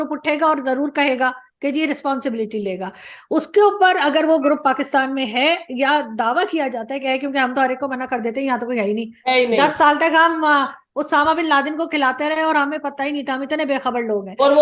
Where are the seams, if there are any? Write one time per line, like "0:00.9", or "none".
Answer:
none